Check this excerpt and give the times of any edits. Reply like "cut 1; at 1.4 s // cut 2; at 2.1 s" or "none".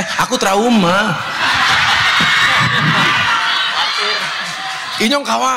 none